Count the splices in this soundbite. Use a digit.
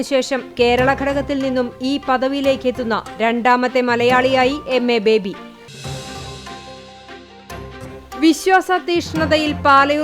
2